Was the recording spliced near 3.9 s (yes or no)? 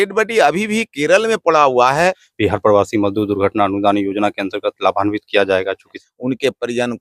no